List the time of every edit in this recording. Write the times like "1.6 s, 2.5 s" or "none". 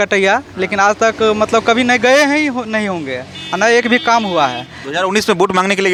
none